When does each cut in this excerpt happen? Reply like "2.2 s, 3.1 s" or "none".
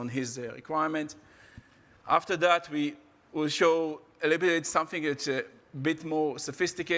none